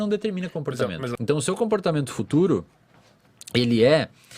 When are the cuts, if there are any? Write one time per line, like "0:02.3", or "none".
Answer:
0:01.1